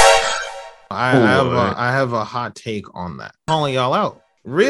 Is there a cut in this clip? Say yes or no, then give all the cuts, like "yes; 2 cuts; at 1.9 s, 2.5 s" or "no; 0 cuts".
yes; 1 cut; at 3.4 s